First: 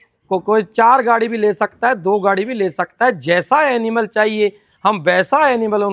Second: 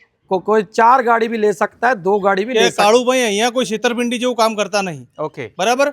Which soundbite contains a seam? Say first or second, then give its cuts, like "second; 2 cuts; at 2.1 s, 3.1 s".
second; 1 cut; at 2.5 s